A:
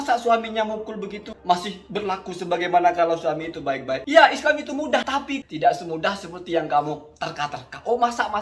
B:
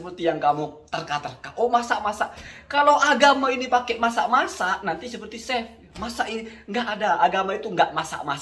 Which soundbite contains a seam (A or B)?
A